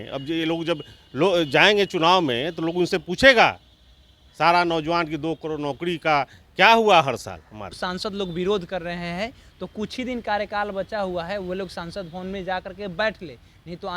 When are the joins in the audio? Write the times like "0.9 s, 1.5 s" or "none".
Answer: 7.8 s